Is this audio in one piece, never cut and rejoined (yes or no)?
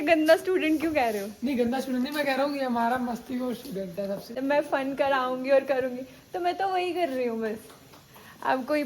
no